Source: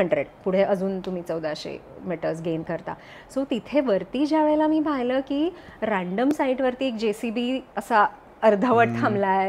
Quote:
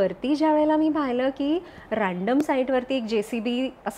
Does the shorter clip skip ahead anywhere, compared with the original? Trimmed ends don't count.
no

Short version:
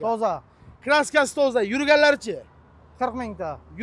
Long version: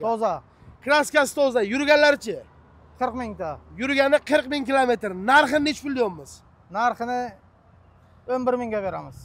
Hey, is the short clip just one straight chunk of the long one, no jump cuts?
yes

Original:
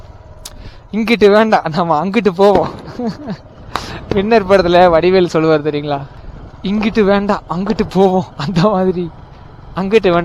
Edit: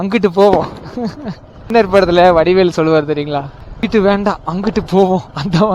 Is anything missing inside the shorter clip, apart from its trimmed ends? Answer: yes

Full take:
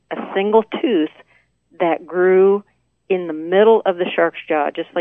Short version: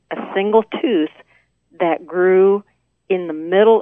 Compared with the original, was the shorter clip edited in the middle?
no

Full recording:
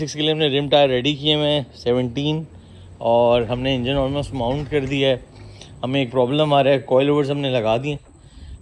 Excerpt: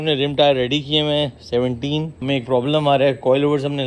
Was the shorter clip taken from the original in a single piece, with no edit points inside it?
no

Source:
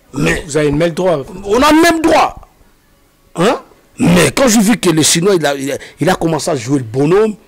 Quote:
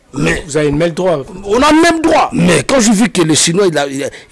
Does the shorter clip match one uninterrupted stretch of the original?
no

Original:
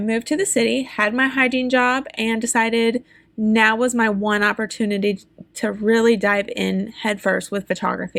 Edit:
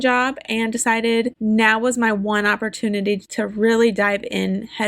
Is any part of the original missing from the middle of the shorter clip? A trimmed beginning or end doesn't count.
yes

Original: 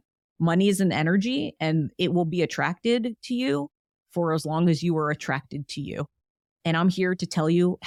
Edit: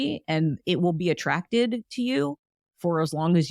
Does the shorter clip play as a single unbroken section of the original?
yes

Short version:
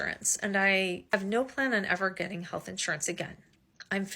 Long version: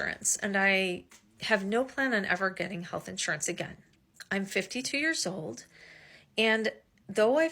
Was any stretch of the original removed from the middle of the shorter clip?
yes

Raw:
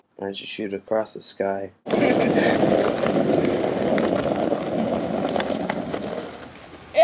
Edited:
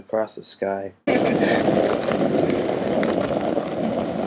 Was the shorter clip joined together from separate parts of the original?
yes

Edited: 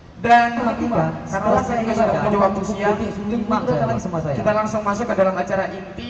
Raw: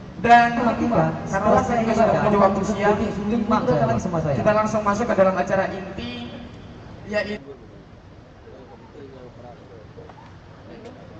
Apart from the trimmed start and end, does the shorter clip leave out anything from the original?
no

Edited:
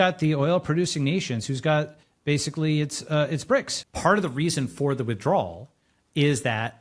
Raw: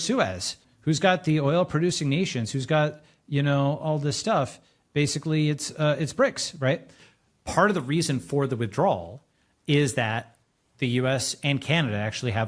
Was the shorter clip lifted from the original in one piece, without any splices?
no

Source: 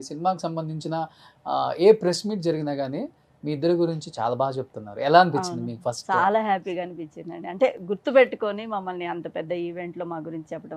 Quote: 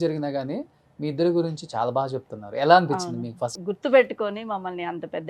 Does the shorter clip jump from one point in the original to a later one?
yes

